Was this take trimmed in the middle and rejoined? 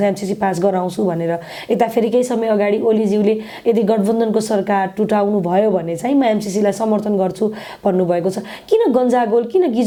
no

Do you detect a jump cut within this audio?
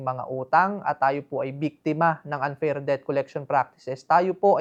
no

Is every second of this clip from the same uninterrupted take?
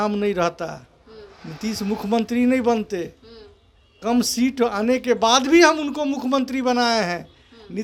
yes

